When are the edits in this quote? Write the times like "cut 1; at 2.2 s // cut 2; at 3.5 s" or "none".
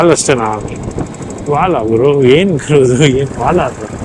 none